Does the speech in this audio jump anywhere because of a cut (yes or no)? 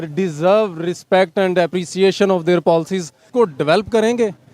yes